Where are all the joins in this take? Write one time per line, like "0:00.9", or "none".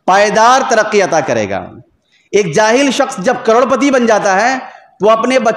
none